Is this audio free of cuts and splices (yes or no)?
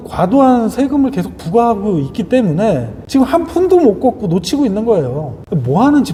yes